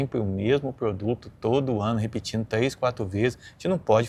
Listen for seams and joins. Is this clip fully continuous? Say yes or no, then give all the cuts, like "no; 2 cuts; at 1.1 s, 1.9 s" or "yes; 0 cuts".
yes; 0 cuts